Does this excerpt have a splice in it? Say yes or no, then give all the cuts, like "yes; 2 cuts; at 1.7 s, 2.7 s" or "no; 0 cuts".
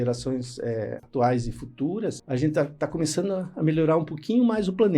yes; 2 cuts; at 1.0 s, 2.2 s